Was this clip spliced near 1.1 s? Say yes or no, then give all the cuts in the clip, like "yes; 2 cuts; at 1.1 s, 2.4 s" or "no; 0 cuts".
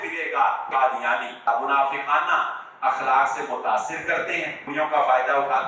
yes; 2 cuts; at 1.1 s, 4.6 s